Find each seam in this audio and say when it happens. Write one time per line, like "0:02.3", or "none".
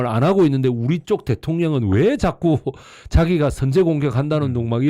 none